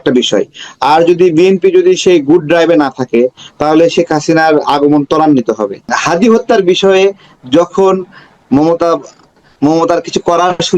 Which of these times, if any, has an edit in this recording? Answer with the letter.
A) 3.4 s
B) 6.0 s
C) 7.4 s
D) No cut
B